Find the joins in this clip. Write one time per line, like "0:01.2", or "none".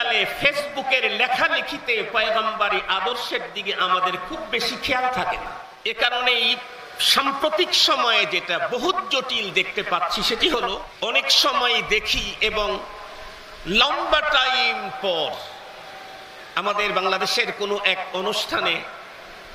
0:05.7
0:10.8